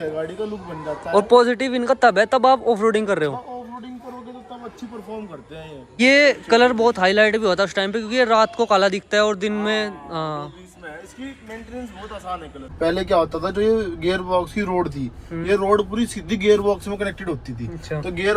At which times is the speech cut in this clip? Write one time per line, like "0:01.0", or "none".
0:06.0
0:12.7